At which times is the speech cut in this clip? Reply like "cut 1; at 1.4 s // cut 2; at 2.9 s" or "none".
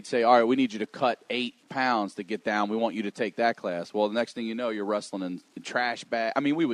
cut 1; at 1.6 s